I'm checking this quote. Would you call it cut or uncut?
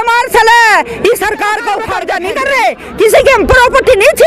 cut